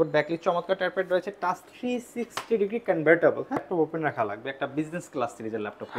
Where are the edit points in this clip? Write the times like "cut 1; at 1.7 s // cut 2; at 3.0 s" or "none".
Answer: cut 1; at 3.7 s